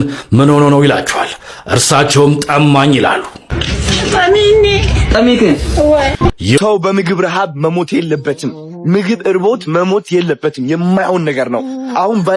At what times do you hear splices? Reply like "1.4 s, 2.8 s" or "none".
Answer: 6.6 s